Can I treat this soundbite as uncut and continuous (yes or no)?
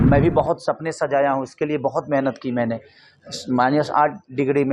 yes